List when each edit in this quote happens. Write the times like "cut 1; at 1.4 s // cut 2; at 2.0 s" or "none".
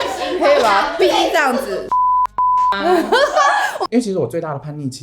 cut 1; at 3.9 s